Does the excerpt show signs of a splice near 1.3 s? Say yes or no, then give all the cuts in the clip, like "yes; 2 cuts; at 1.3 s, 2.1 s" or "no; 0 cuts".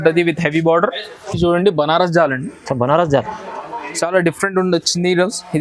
yes; 1 cut; at 1.3 s